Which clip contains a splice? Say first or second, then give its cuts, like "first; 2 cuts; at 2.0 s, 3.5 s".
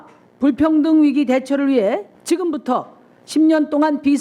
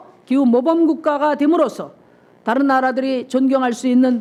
first; 1 cut; at 2.1 s